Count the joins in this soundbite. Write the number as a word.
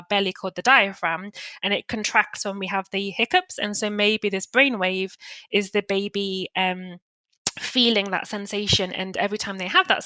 zero